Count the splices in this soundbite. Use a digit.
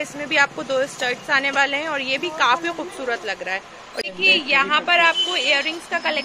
1